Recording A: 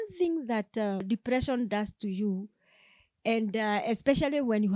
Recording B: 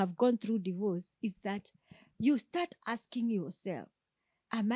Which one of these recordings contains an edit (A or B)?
A